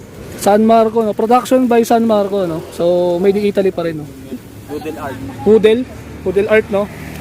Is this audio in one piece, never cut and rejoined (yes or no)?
no